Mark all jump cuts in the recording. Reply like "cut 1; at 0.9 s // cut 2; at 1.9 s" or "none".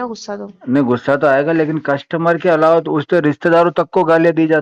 none